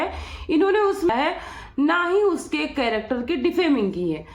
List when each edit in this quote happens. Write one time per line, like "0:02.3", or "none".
0:01.1